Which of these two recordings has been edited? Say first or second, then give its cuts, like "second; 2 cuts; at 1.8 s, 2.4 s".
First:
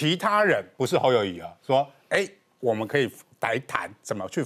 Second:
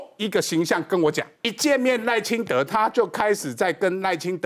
second; 1 cut; at 1.5 s